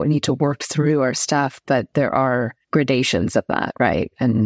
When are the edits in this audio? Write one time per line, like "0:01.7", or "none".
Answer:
0:02.6